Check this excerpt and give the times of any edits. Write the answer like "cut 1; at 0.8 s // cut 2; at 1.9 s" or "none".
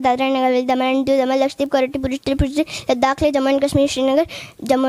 none